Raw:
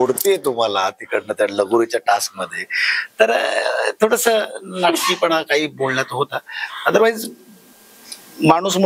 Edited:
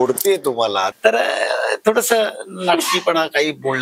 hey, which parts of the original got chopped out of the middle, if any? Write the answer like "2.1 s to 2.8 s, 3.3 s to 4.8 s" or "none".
0.9 s to 3.1 s